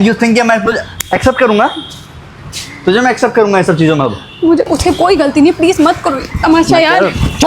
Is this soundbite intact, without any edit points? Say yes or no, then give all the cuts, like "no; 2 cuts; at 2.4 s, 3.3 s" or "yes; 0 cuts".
no; 1 cut; at 4.7 s